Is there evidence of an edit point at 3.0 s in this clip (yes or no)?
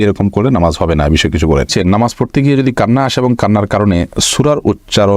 no